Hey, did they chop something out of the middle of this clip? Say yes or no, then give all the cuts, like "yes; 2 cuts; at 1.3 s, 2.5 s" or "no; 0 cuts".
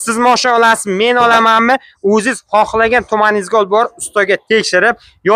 no; 0 cuts